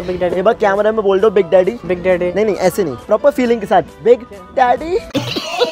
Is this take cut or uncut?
uncut